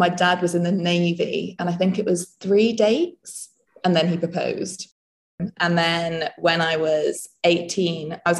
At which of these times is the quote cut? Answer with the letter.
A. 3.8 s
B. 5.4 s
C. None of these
B